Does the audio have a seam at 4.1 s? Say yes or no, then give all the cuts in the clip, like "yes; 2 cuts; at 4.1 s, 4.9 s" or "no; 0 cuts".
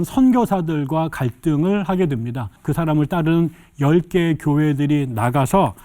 no; 1 cut; at 2.6 s